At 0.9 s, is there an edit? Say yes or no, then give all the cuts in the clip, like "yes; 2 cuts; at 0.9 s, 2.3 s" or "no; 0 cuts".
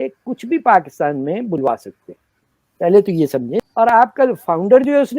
no; 1 cut; at 3.6 s